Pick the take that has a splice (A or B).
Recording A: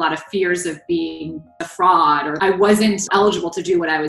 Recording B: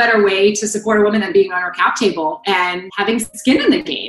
A